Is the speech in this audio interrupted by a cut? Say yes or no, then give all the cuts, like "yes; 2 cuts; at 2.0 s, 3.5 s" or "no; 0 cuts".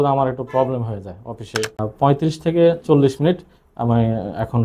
yes; 1 cut; at 1.8 s